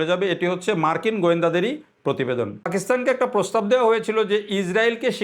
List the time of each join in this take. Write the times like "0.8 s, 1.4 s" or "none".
2.7 s